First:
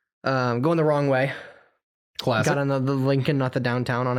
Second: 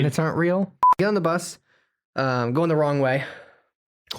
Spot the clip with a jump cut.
second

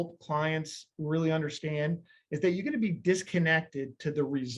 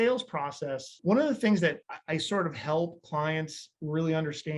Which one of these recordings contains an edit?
second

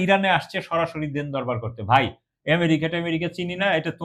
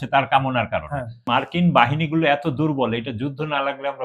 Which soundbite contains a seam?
second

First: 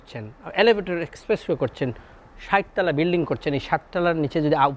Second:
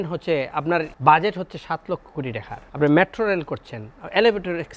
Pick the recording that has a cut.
second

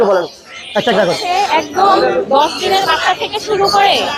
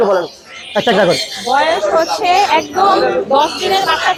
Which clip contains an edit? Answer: first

